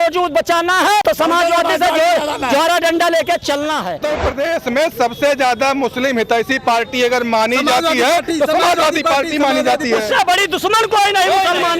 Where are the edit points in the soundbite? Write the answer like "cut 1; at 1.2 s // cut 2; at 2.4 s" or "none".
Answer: cut 1; at 1.0 s // cut 2; at 4.0 s